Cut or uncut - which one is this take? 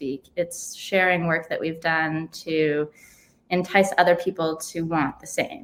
uncut